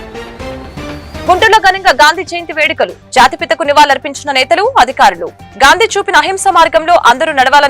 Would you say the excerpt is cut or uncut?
cut